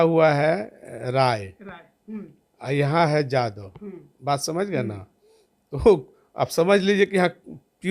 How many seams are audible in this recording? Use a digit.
0